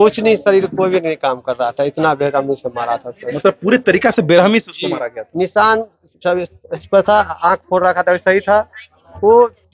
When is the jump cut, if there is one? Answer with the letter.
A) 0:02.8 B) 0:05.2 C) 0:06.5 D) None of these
D